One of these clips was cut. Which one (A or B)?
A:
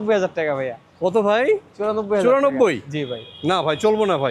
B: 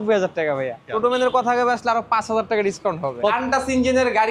B